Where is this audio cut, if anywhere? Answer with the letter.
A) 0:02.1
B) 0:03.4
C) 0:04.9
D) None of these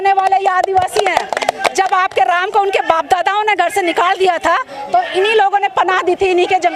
D